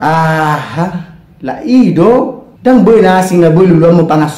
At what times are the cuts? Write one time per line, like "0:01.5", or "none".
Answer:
0:02.4